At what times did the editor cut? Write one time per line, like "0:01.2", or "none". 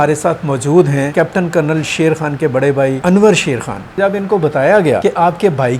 0:01.1
0:03.0
0:04.0
0:05.0